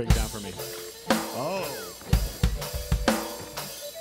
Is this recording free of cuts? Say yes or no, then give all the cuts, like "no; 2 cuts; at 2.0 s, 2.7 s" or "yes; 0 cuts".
yes; 0 cuts